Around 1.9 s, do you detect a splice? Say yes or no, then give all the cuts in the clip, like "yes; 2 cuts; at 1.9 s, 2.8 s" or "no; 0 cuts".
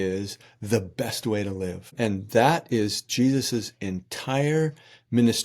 yes; 1 cut; at 1.9 s